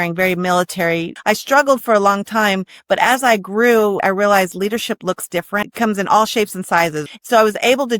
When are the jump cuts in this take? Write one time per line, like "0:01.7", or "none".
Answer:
0:01.1
0:04.0
0:05.7
0:07.0